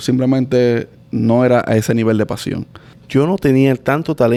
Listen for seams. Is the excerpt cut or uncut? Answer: uncut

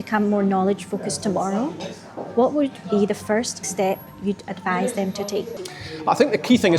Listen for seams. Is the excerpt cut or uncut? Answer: cut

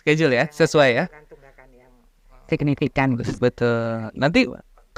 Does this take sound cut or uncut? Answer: cut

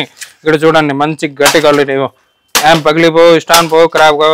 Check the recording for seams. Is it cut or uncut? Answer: uncut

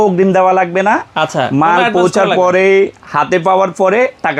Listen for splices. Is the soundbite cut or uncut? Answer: uncut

